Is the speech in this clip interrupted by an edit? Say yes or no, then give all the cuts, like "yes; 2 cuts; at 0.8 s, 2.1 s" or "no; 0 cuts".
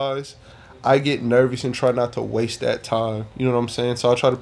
no; 0 cuts